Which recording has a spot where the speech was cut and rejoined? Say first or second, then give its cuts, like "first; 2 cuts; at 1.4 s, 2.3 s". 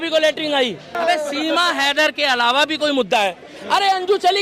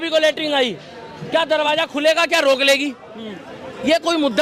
first; 1 cut; at 1.0 s